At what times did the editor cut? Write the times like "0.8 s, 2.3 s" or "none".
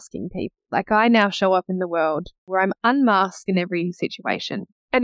2.5 s